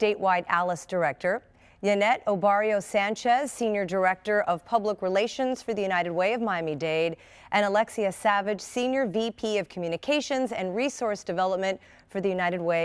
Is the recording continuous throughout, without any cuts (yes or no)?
yes